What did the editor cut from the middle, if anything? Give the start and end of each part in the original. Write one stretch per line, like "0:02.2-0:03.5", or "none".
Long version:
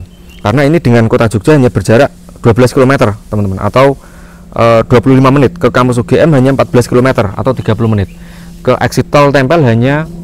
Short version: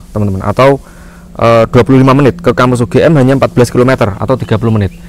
none